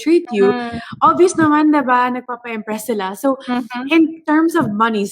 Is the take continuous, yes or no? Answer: yes